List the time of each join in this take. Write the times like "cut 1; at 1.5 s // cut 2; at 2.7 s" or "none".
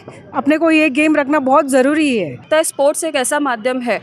cut 1; at 2.5 s